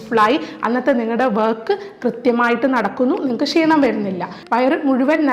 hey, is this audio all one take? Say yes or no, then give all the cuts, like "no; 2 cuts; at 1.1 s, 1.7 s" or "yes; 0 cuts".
no; 1 cut; at 4.4 s